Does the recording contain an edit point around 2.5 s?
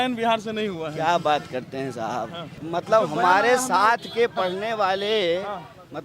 yes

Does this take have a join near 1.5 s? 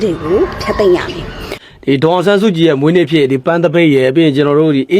yes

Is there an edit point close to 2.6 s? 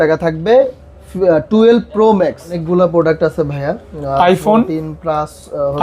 yes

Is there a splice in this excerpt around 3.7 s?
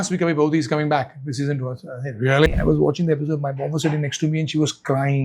no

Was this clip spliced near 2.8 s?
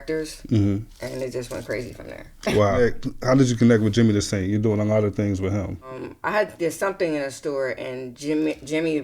yes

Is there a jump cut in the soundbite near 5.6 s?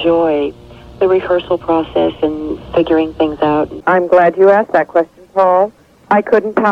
no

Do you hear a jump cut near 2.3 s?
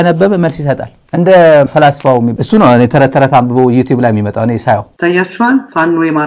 yes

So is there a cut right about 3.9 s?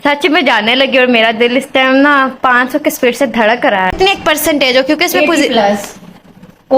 yes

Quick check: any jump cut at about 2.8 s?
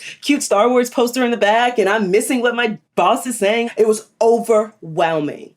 yes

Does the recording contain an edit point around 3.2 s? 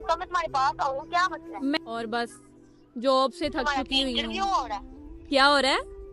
no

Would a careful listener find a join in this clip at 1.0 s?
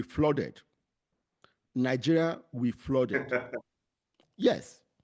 no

